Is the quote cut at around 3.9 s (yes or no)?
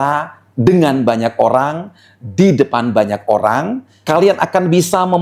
yes